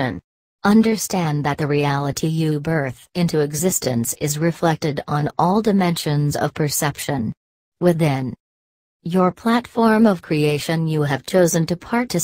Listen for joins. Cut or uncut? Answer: cut